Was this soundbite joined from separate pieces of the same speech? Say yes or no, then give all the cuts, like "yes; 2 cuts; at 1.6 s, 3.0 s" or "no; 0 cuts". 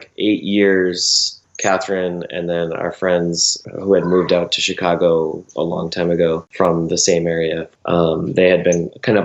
no; 0 cuts